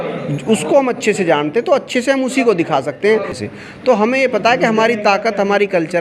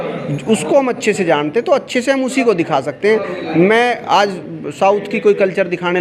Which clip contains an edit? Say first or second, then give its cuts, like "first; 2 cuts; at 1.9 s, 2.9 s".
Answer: first; 1 cut; at 3.4 s